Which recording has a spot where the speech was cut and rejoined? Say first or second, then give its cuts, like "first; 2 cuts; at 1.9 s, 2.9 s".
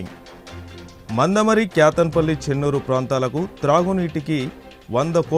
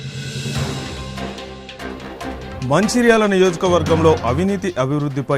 second; 1 cut; at 0.9 s